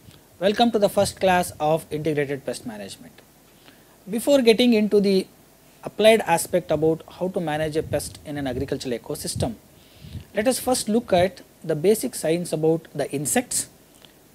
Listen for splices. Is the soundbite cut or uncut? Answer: uncut